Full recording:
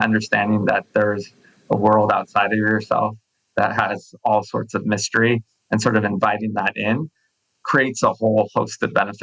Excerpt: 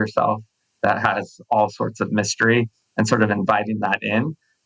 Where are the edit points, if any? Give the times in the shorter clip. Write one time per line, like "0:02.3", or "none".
none